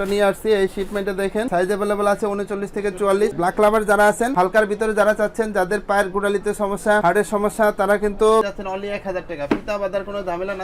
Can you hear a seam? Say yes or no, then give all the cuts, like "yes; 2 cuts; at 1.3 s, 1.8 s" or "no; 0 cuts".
yes; 3 cuts; at 1.5 s, 3.4 s, 8.4 s